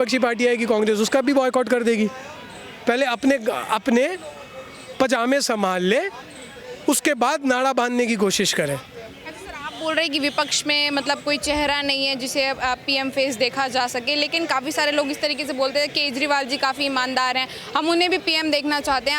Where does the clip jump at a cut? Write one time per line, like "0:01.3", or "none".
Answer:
none